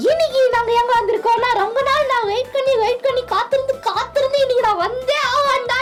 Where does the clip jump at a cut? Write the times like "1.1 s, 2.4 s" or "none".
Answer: none